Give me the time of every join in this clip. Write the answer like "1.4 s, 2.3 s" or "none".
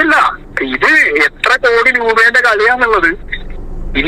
none